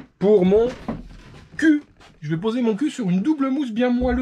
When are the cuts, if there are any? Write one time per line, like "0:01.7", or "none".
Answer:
none